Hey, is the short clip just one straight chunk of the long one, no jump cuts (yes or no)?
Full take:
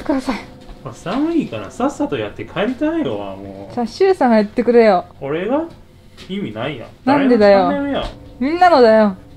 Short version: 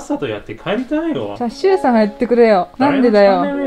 no